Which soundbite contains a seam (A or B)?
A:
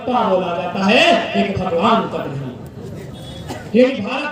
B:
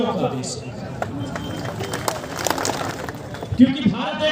B